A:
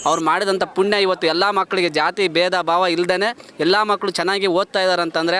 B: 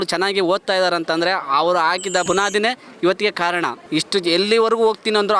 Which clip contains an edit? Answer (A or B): B